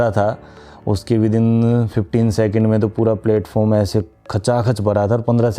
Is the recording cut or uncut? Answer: uncut